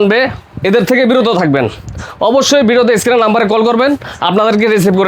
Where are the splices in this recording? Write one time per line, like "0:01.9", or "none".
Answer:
none